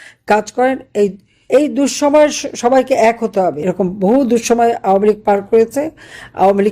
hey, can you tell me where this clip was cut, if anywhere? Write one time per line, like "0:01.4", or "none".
0:03.6